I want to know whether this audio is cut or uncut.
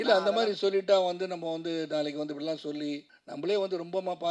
cut